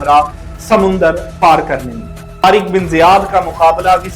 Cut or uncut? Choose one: cut